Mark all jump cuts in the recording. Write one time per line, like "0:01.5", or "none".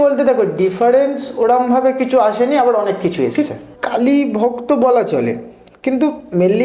0:03.3